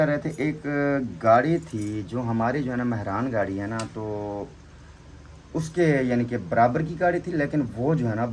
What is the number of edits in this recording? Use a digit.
0